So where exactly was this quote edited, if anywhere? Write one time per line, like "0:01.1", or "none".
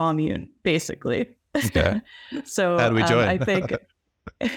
none